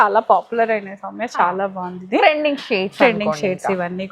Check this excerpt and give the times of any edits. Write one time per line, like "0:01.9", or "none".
none